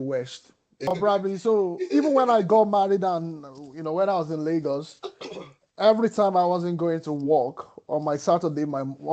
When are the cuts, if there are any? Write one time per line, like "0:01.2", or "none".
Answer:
0:00.9